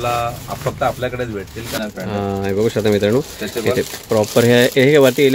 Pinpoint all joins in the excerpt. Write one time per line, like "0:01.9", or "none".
0:01.8